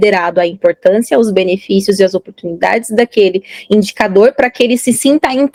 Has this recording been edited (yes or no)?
no